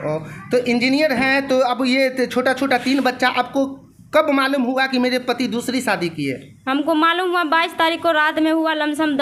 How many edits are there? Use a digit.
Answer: 0